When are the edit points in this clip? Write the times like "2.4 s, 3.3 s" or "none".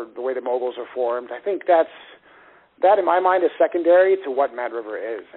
none